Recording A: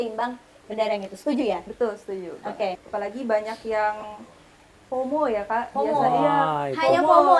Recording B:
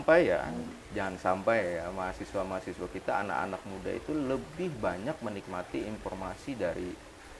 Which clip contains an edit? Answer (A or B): A